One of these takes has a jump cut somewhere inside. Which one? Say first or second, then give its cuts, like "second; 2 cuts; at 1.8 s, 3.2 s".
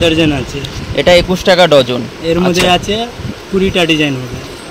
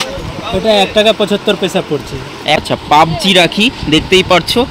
second; 1 cut; at 2.7 s